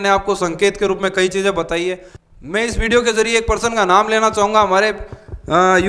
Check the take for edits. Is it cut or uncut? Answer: cut